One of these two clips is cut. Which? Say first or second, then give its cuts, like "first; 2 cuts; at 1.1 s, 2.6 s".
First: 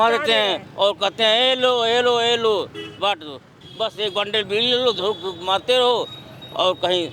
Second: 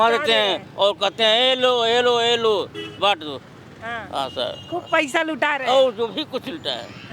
first; 1 cut; at 3.6 s